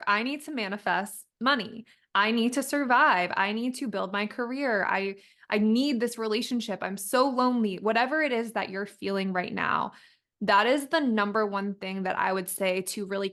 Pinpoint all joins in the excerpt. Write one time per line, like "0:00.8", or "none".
none